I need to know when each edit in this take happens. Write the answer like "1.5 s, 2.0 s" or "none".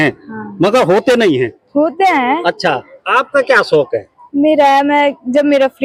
none